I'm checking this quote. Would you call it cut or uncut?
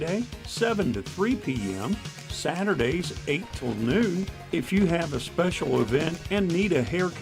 uncut